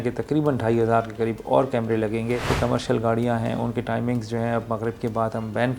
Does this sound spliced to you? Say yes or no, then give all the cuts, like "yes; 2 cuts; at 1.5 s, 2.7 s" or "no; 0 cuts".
yes; 1 cut; at 2.5 s